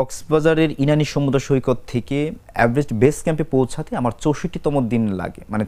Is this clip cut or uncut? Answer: uncut